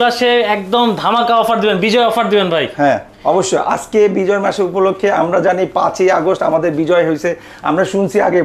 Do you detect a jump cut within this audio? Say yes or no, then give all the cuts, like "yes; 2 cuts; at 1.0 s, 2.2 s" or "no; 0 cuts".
no; 0 cuts